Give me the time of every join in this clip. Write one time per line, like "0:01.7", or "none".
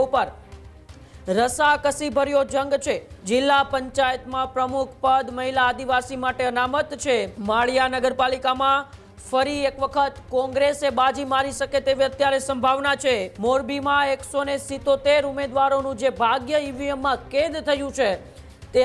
0:03.1
0:07.3
0:13.3